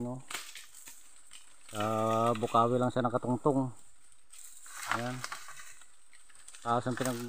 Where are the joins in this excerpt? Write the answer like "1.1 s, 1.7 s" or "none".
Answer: none